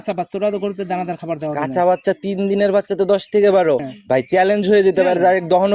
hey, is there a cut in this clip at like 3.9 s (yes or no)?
yes